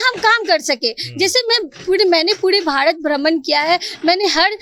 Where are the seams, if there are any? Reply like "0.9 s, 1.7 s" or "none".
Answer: none